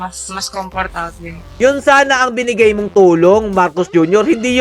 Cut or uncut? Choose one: cut